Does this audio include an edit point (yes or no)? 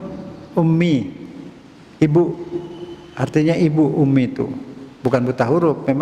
no